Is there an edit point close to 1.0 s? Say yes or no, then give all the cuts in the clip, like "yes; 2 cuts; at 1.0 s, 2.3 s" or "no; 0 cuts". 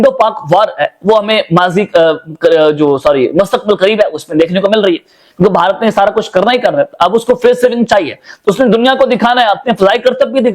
no; 0 cuts